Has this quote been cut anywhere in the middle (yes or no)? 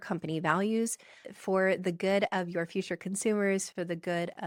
no